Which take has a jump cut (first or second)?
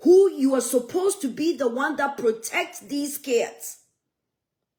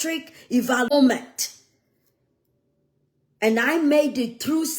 second